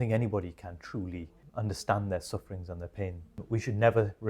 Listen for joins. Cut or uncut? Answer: cut